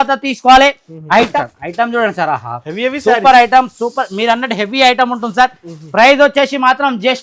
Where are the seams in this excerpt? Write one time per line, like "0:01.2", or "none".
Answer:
0:01.3